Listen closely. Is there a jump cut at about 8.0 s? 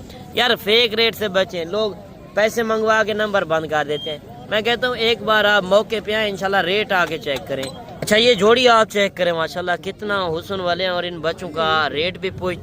yes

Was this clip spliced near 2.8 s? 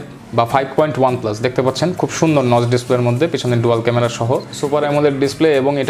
no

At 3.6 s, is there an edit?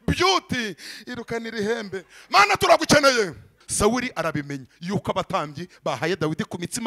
yes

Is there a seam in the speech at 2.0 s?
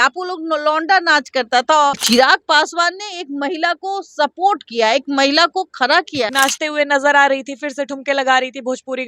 yes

